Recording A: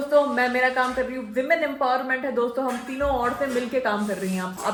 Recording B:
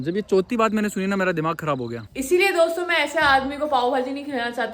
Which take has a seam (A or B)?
B